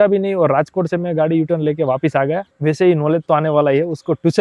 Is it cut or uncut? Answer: cut